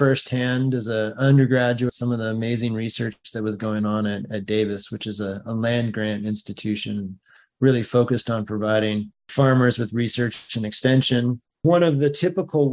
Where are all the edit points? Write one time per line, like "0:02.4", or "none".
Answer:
0:01.9
0:09.2
0:11.5